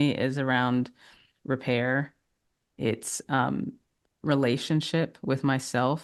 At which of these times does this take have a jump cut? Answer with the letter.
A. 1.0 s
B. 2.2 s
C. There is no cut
C